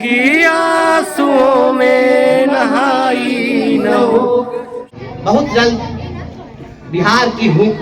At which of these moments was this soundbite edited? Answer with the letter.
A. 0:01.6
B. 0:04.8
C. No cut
B